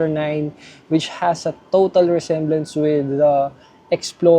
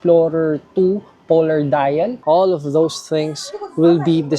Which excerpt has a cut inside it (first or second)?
second